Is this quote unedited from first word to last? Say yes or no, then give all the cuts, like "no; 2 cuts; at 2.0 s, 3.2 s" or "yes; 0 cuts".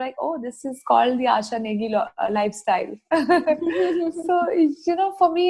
yes; 0 cuts